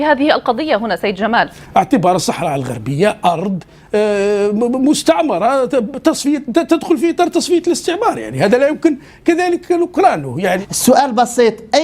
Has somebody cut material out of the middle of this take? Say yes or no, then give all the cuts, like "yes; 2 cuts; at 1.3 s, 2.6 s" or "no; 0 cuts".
yes; 2 cuts; at 1.6 s, 10.7 s